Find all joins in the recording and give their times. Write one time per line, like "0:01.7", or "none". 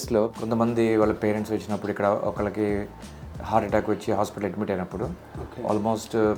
none